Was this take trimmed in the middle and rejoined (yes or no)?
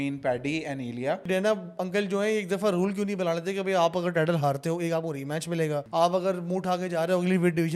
yes